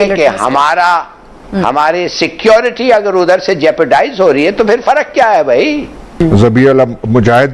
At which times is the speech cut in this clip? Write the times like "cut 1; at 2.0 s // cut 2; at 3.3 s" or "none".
cut 1; at 6.2 s